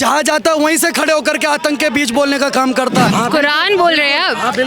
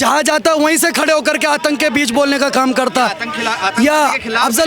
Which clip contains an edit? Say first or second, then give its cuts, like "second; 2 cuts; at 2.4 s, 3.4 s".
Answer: first; 1 cut; at 3.1 s